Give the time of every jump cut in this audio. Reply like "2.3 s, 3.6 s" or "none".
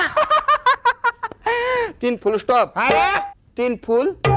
3.4 s